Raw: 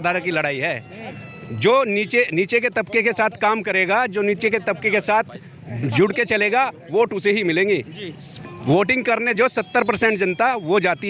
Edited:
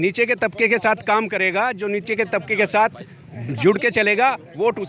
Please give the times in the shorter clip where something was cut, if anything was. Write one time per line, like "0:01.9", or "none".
none